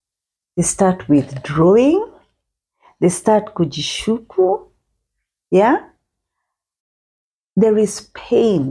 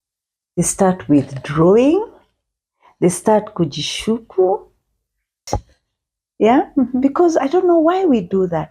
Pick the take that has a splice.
second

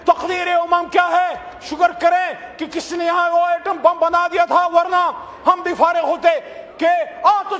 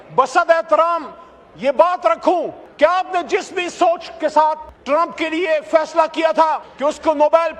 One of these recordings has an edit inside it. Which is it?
second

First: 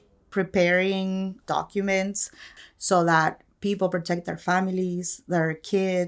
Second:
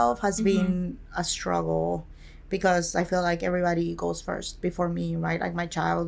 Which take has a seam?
first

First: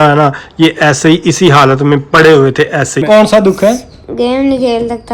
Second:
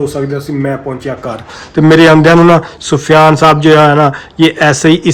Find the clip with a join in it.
first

